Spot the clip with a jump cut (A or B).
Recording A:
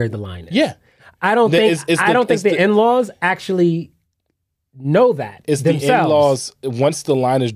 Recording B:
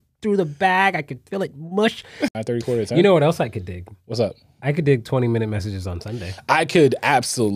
B